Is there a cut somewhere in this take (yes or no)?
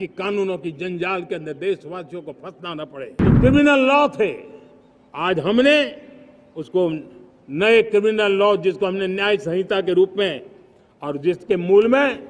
yes